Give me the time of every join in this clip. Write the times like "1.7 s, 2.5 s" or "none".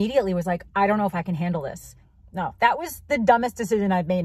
1.8 s